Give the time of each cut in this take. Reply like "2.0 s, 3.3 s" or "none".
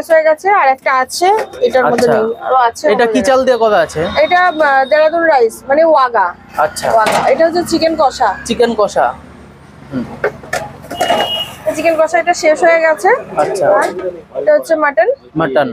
none